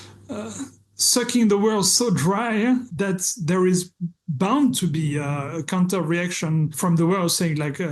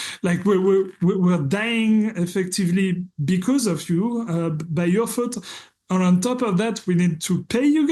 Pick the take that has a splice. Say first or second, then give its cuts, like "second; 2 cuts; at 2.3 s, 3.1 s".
first; 2 cuts; at 2.9 s, 6.7 s